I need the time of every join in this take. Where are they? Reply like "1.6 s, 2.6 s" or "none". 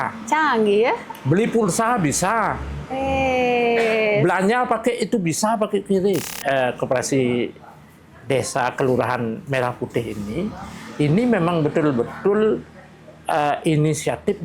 6.3 s